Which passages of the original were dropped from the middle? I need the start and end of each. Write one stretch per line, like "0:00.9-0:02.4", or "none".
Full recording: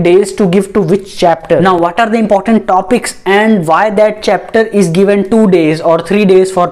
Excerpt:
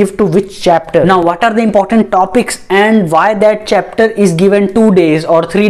none